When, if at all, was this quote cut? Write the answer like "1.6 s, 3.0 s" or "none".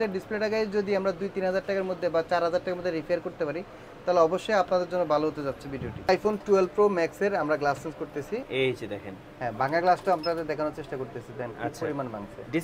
6.1 s, 8.4 s